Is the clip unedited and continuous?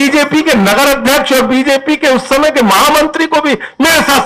yes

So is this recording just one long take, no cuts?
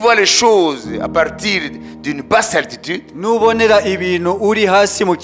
yes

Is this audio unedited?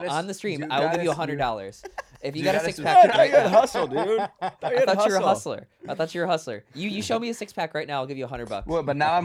yes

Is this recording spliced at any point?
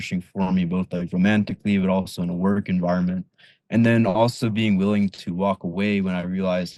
no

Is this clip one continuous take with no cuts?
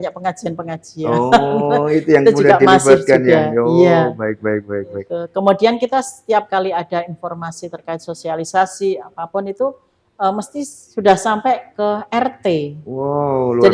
yes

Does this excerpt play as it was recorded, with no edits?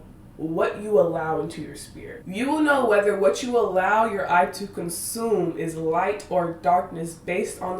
no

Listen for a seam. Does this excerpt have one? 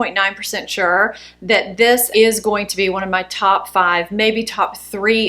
yes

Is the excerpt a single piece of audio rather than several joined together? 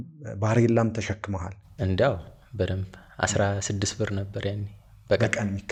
yes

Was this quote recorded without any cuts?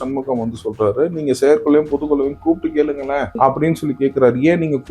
no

